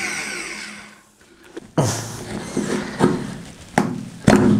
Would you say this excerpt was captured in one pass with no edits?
yes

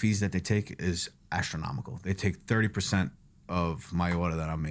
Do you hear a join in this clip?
no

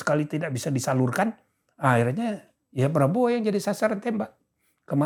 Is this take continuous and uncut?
yes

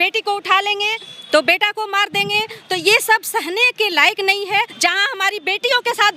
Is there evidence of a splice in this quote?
yes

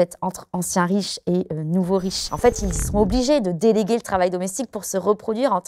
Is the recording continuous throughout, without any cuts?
no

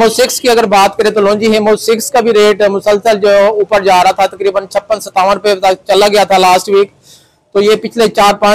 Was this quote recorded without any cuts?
yes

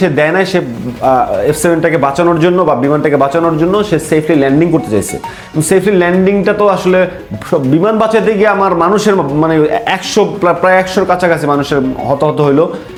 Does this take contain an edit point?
no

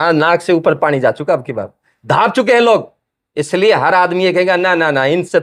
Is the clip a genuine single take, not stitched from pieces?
yes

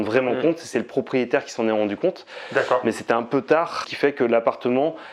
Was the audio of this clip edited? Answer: yes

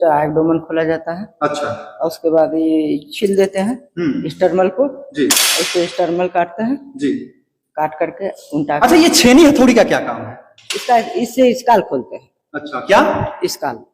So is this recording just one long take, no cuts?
yes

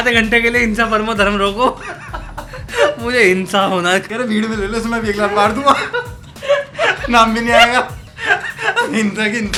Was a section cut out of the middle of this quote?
no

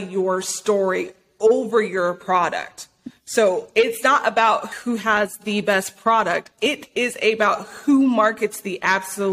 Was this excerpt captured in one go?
no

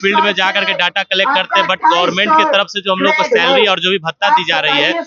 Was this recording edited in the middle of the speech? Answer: no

